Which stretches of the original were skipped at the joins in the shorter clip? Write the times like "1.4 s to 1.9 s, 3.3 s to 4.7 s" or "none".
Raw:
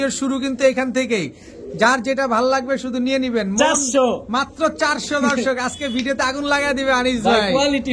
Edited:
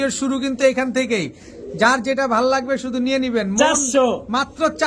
none